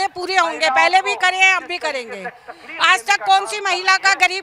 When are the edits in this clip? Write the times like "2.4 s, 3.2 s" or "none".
none